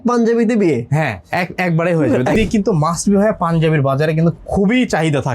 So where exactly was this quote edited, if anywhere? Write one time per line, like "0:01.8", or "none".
0:02.4